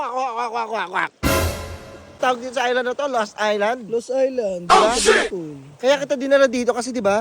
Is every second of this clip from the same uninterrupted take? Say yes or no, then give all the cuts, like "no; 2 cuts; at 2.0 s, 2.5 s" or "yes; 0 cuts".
no; 1 cut; at 2.1 s